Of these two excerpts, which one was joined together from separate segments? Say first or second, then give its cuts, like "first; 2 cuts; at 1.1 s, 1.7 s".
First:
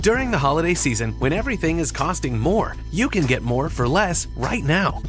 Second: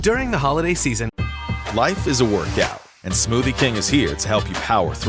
first; 1 cut; at 1.1 s